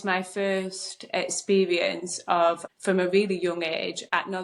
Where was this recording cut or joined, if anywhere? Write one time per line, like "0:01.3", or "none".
0:02.7